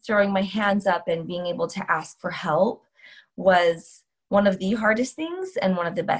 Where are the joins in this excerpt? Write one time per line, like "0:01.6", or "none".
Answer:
none